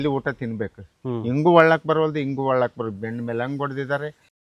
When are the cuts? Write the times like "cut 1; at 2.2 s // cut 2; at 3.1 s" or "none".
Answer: none

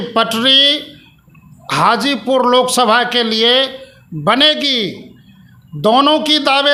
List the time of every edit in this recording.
none

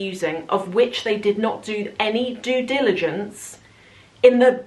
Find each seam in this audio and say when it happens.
none

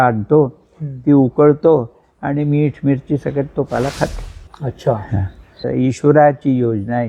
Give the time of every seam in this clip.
cut 1; at 5.6 s

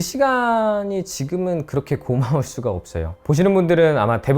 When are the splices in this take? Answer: cut 1; at 3.1 s

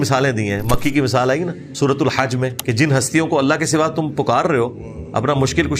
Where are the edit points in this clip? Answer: cut 1; at 1.6 s // cut 2; at 2.6 s

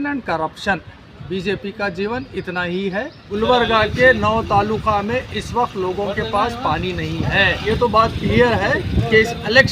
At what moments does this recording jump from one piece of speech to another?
cut 1; at 3.2 s // cut 2; at 7.7 s

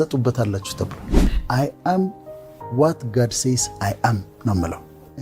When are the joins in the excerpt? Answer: cut 1; at 1.2 s

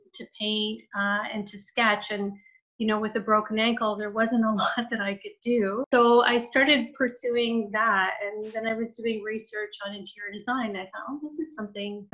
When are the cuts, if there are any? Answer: cut 1; at 5.9 s

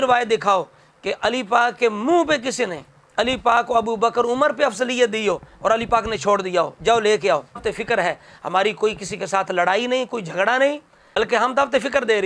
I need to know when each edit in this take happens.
cut 1; at 7.6 s

